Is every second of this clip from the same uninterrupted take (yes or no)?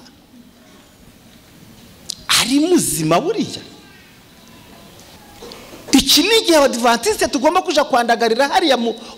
no